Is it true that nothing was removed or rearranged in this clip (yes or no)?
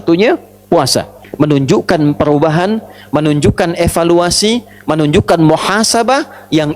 no